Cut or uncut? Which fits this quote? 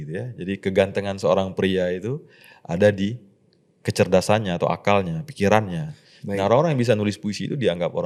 uncut